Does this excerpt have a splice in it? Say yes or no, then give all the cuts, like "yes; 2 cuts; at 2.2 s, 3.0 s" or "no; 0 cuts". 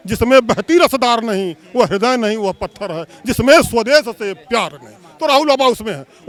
no; 0 cuts